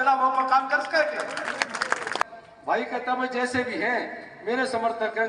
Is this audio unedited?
no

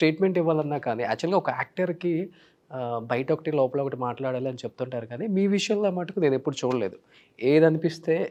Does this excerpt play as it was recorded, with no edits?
yes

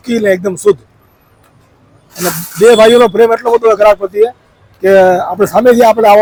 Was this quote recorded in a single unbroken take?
yes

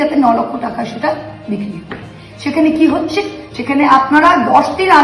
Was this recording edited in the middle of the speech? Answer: no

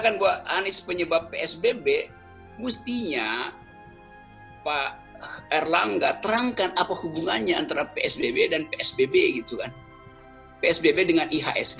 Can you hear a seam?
no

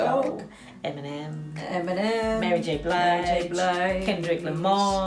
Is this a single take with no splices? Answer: yes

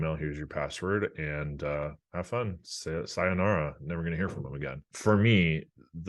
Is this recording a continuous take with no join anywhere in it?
no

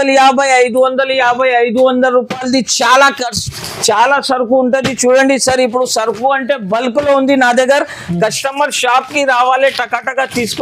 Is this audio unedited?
yes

